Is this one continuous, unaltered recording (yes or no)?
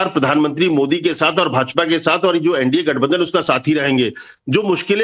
yes